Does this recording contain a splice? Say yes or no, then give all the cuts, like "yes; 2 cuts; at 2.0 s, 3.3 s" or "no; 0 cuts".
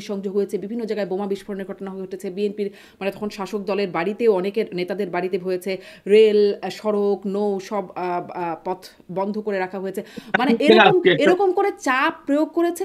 no; 0 cuts